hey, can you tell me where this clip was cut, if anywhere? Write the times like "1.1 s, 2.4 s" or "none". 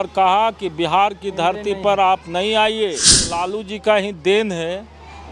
3.3 s